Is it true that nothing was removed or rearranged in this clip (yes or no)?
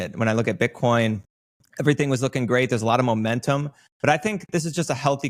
yes